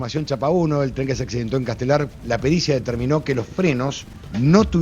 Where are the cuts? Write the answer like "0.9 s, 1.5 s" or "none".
2.1 s

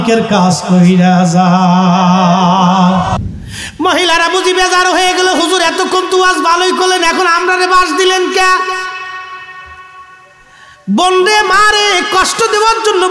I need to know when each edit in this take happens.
3.1 s

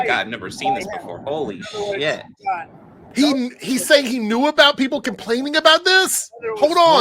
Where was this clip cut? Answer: 3.0 s

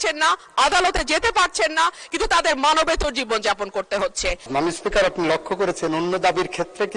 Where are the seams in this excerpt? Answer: 4.4 s

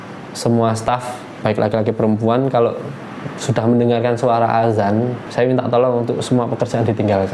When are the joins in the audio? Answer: 1.4 s, 5.2 s

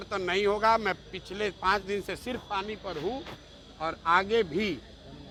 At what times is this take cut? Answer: none

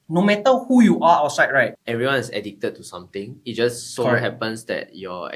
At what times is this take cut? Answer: 1.8 s

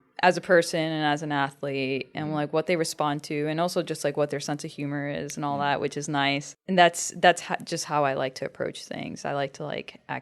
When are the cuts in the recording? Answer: 6.5 s

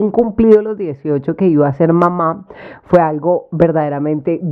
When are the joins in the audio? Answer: none

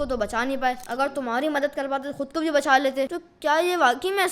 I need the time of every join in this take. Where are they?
0.8 s, 3.2 s

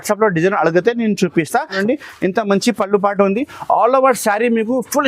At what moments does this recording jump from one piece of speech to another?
1.8 s

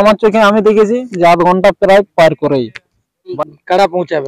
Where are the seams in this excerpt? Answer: 3.3 s

